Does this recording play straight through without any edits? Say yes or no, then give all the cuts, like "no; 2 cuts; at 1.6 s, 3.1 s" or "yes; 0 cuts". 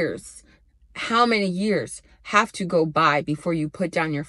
yes; 0 cuts